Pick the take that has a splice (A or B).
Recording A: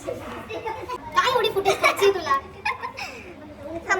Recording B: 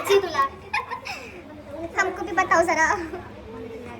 A